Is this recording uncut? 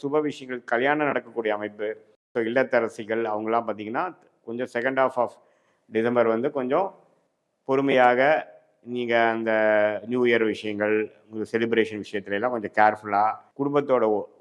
no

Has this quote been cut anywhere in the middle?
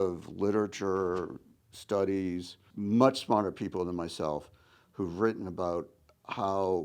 yes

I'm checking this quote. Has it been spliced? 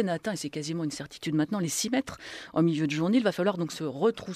no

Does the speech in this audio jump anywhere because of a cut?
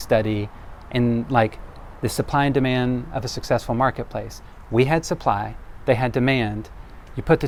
no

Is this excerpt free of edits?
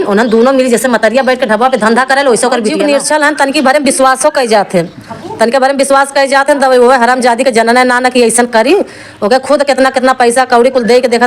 no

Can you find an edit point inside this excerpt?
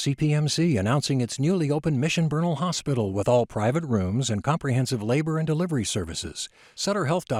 no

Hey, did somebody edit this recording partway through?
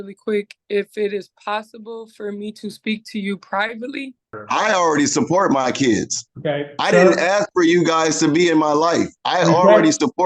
yes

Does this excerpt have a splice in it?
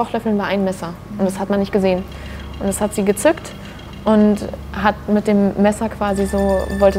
no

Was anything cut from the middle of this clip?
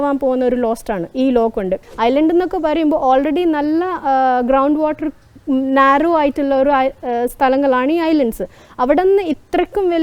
yes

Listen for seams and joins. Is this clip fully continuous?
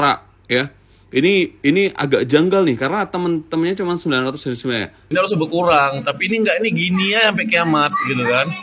no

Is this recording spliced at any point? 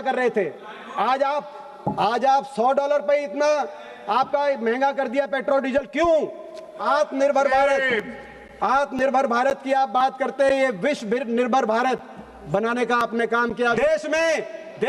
yes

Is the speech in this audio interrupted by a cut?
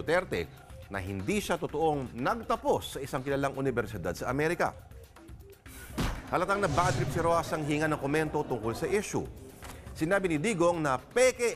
no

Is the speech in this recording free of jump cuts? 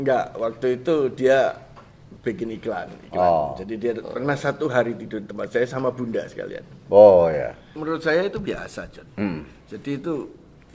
no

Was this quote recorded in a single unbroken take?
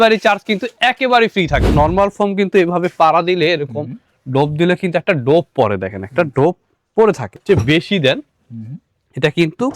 no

